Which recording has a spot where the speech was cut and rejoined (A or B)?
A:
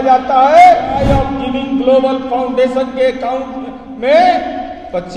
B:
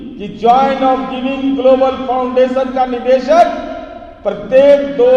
A